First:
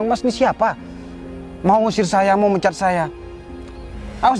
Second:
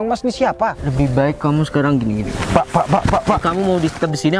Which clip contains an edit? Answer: second; 3 cuts; at 0.8 s, 2.3 s, 3.4 s

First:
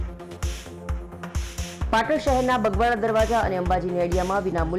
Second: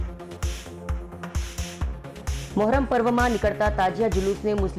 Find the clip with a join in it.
second; 1 cut; at 1.4 s

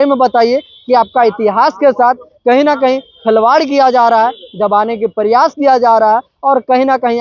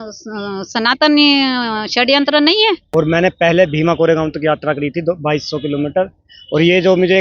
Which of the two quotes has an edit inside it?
second; 1 cut; at 2.9 s

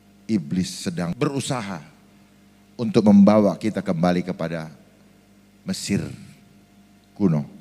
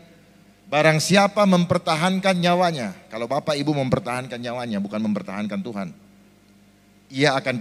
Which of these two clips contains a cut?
first; 1 cut; at 1.1 s

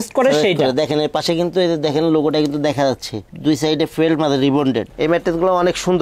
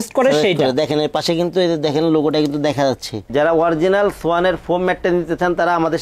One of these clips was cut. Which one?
second; 1 cut; at 3.2 s

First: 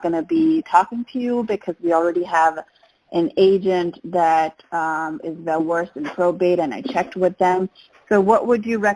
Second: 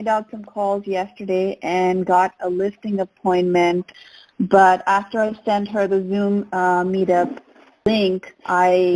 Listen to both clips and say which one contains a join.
second; 2 cuts; at 3.9 s, 7.8 s

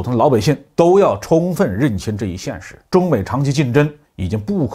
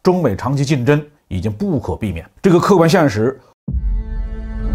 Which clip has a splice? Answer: second; 1 cut; at 3.4 s

